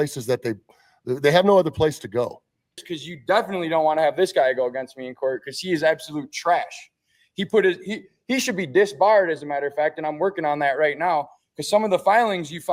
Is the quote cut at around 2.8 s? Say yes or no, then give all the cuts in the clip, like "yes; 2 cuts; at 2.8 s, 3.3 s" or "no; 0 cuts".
yes; 1 cut; at 2.8 s